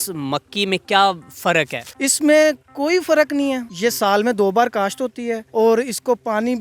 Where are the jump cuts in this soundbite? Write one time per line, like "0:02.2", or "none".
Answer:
0:01.8
0:03.7
0:05.4

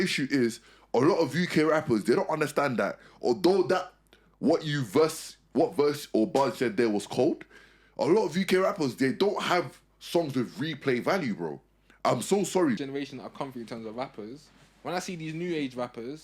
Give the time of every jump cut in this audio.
0:12.8

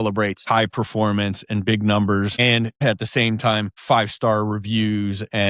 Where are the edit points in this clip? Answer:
0:02.7

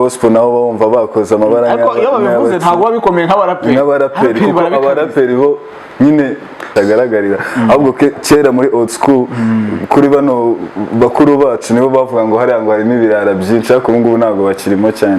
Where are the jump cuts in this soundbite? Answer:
0:06.7

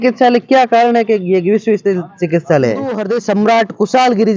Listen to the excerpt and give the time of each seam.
0:03.0

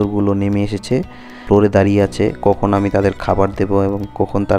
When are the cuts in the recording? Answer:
0:01.4

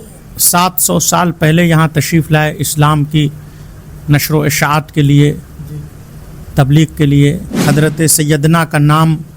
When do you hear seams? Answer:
0:07.5

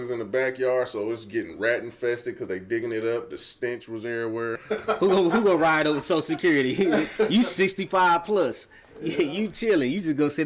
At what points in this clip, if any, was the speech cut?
0:04.6

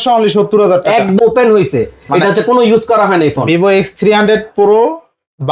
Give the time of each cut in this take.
0:01.1

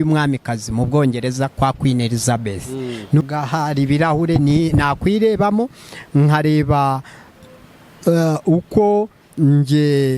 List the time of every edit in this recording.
0:03.2

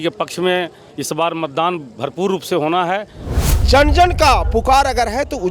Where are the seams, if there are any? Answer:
0:03.2

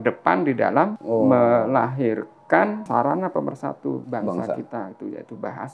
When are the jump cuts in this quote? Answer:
0:01.0
0:02.8
0:04.0

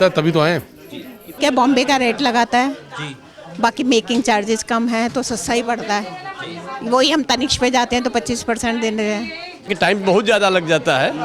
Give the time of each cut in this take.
0:01.4
0:09.7

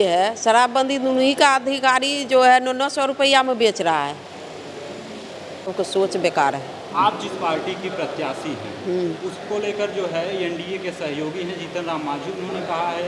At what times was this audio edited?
0:05.7

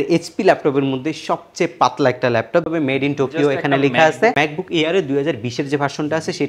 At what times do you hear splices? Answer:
0:02.7
0:04.4

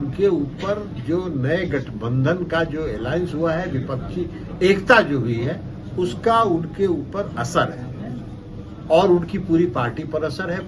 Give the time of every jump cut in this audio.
none

